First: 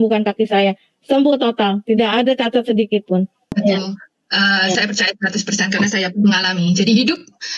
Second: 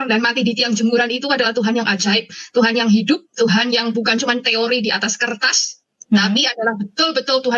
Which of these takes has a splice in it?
first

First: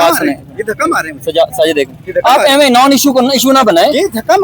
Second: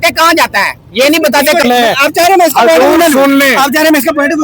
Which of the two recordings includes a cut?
second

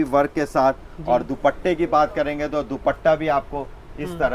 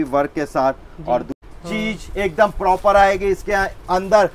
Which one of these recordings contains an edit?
second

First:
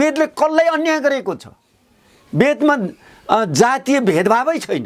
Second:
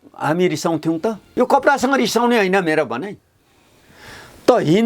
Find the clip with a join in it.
second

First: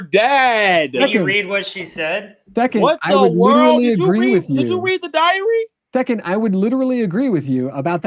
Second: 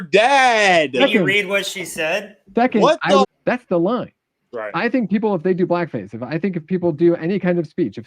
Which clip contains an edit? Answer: second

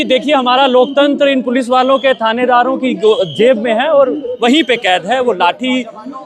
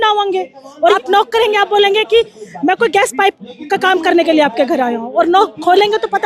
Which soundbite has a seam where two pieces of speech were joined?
second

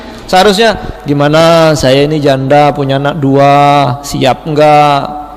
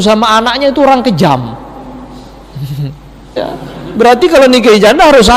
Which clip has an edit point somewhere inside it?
second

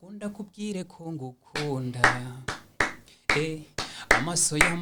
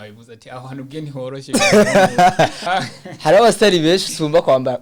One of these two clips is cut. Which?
second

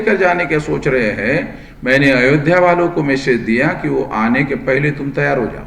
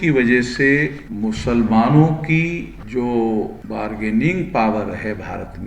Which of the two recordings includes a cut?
second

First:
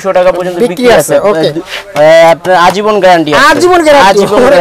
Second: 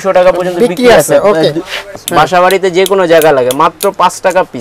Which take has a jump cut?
second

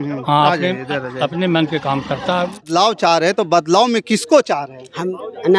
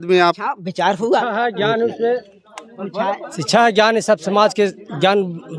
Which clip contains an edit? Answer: first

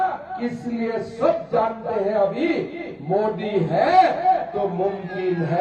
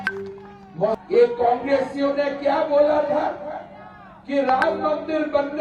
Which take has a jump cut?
second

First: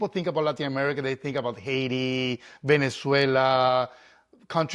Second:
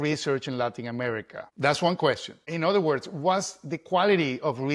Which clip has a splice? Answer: second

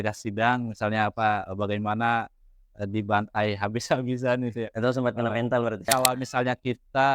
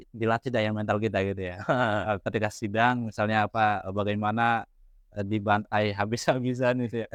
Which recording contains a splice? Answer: first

